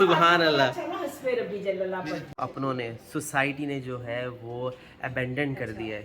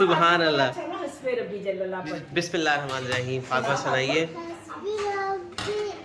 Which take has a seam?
first; 1 cut; at 2.3 s

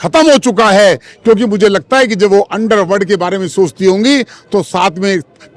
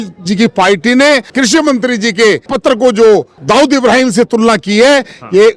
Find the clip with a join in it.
second; 3 cuts; at 1.3 s, 2.5 s, 3.3 s

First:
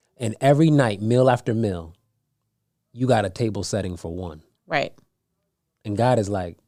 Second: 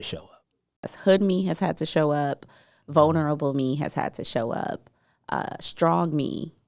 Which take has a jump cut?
second; 1 cut; at 0.9 s

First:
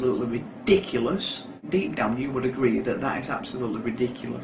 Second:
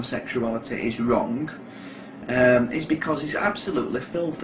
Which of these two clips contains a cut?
first; 1 cut; at 1.6 s

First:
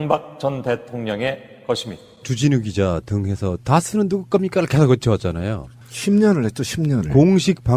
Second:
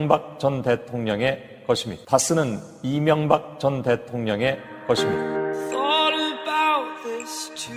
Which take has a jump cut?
first; 1 cut; at 1.9 s

